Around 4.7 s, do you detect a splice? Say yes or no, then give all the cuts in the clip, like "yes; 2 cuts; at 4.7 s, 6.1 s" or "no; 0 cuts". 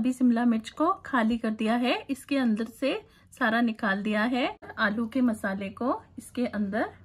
yes; 1 cut; at 4.7 s